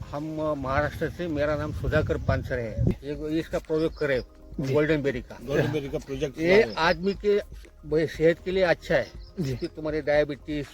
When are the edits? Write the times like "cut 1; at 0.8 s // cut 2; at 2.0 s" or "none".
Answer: cut 1; at 2.9 s

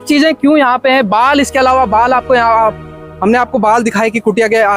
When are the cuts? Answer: none

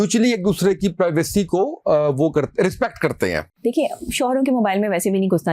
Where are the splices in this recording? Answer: cut 1; at 3.5 s

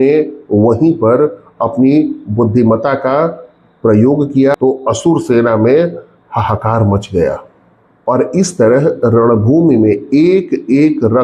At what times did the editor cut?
cut 1; at 4.6 s

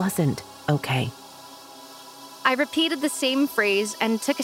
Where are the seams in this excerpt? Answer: cut 1; at 1.8 s

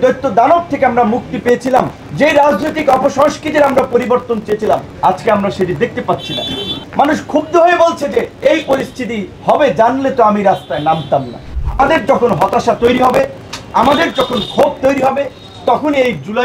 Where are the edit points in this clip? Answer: cut 1; at 2.0 s // cut 2; at 4.9 s // cut 3; at 6.8 s // cut 4; at 8.3 s // cut 5; at 9.3 s // cut 6; at 11.5 s

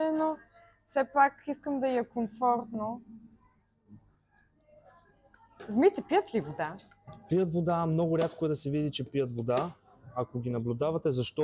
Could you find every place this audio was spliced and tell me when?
none

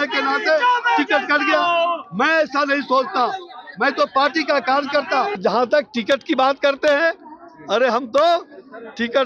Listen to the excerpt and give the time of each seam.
cut 1; at 5.4 s

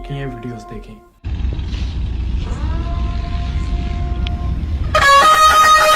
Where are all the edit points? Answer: none

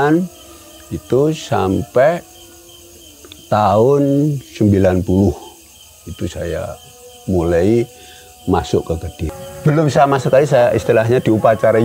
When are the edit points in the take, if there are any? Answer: cut 1; at 9.3 s

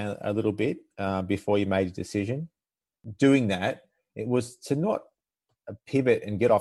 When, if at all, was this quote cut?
cut 1; at 2.9 s

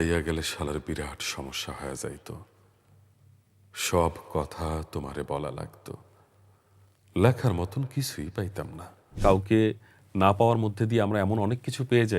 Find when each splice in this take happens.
cut 1; at 9.2 s

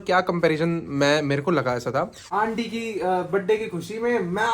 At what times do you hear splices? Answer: cut 1; at 2.3 s

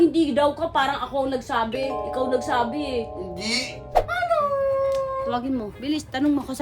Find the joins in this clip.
cut 1; at 3.9 s

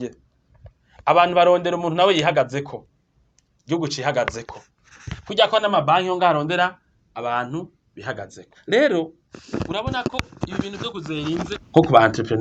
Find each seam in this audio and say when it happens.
none

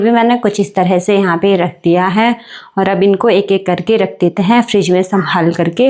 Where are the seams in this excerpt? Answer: none

